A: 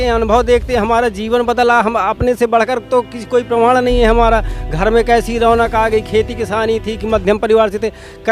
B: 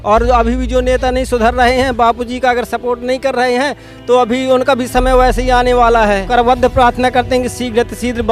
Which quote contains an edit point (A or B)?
B